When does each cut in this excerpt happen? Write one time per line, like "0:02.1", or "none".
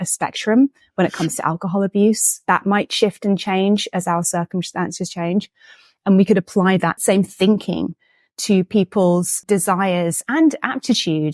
0:07.0
0:09.3